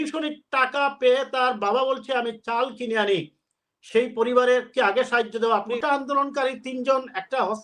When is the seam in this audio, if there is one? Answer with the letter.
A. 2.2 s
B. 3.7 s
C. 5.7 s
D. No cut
C